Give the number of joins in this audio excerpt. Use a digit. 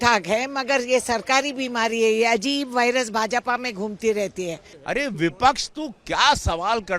1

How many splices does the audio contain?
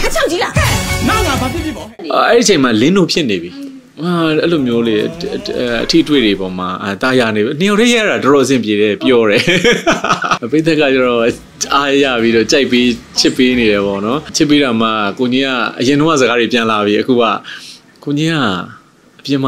3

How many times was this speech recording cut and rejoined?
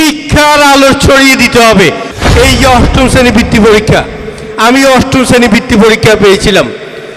1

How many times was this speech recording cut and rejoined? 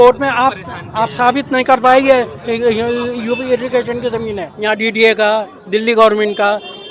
1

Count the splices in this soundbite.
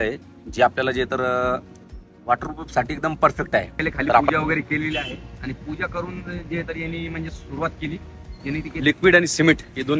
2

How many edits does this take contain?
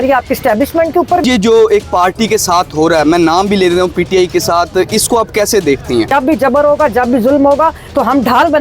2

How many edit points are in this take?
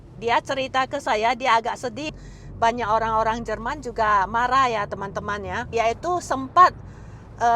2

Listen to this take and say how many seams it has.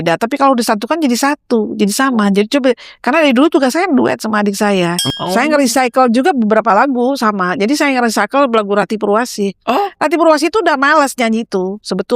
1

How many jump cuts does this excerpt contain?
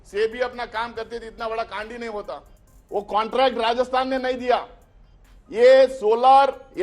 1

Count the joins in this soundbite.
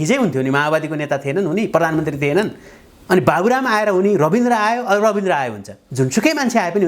1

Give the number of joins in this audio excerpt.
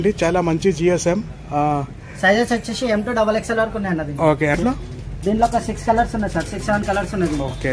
1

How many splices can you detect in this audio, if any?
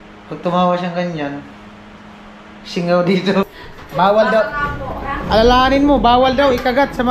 1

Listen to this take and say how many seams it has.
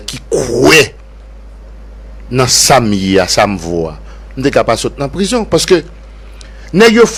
0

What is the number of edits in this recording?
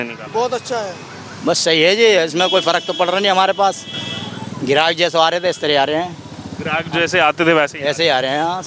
0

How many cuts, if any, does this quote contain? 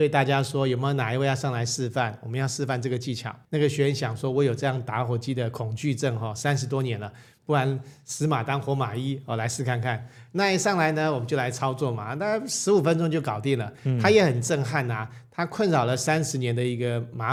0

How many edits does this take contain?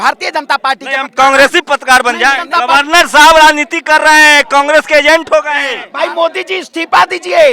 2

